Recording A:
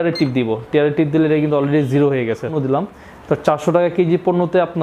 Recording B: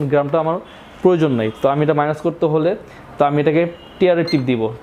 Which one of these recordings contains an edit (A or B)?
A